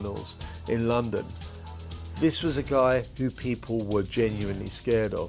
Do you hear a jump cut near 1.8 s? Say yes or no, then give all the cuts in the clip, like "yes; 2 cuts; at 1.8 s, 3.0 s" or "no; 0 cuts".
yes; 1 cut; at 1.8 s